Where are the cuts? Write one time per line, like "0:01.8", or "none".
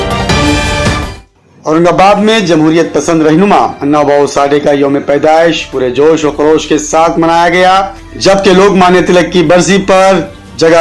0:01.1